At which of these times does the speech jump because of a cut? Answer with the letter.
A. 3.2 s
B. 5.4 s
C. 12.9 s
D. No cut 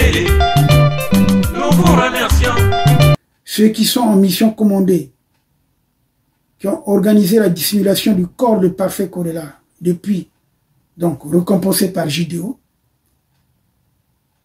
A